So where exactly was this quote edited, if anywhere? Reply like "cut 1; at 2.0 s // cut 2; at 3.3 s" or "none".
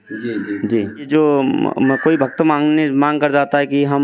cut 1; at 1.1 s

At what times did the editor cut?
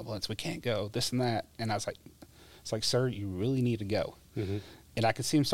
none

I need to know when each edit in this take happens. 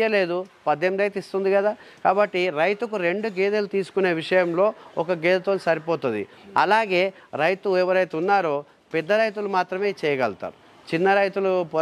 none

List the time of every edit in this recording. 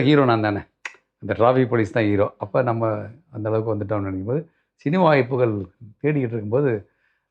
none

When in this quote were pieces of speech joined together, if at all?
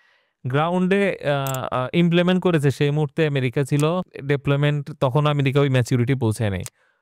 cut 1; at 4.1 s

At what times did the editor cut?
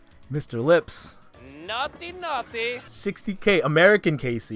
cut 1; at 2.9 s

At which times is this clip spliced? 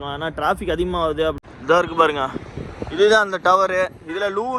cut 1; at 1.4 s

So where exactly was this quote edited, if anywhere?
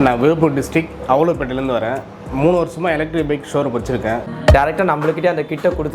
cut 1; at 4.3 s

